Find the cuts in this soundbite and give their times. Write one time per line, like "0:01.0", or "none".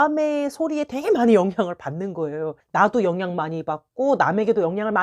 0:02.6